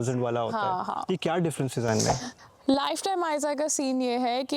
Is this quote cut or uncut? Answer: cut